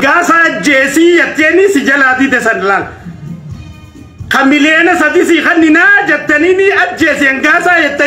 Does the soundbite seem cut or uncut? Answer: uncut